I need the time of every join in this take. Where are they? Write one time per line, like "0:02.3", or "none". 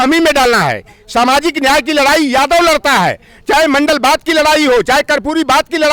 none